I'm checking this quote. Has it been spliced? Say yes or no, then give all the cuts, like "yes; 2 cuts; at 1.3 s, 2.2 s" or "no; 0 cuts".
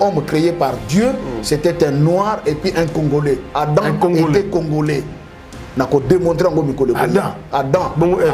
no; 0 cuts